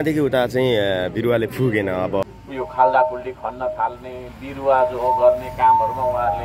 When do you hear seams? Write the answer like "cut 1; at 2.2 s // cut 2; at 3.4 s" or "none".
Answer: cut 1; at 2.2 s